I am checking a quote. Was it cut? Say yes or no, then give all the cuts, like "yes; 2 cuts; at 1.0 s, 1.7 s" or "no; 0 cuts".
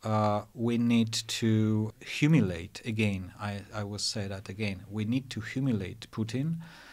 yes; 1 cut; at 1.9 s